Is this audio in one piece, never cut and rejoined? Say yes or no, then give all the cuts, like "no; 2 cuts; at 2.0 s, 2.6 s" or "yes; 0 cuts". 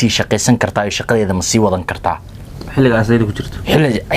yes; 0 cuts